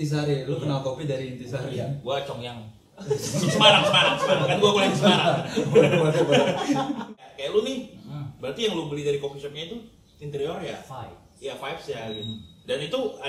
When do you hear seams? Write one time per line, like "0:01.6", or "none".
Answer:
0:07.1

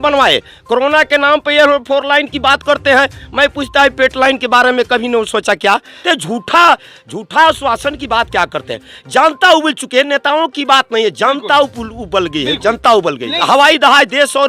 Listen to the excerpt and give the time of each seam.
0:05.9
0:13.3

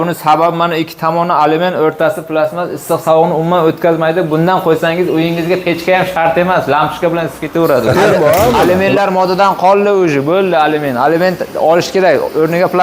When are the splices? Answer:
0:07.9

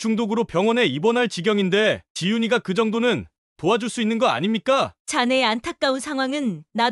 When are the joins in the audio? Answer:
0:05.0

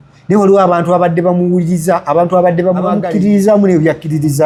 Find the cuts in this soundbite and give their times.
none

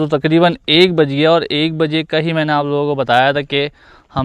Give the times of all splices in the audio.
none

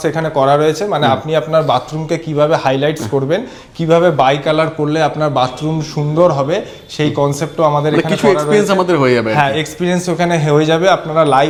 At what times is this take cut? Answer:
none

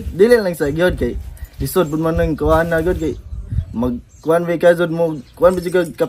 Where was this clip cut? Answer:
none

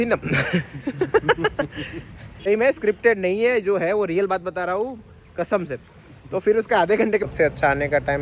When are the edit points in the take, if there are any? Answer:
0:02.5
0:07.2

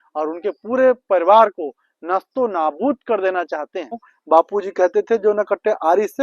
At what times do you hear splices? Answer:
0:04.1

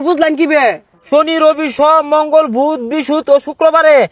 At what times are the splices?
0:00.9

